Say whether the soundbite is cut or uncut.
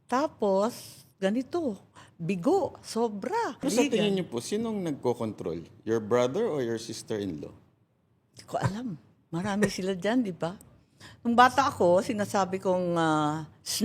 cut